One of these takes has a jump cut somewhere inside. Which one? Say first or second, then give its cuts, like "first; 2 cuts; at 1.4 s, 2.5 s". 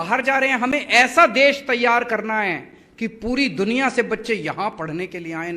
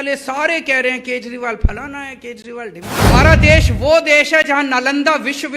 second; 1 cut; at 3.0 s